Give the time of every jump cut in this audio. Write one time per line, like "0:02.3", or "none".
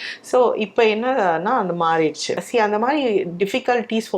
0:02.3